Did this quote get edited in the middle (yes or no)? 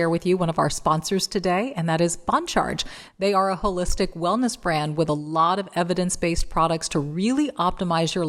no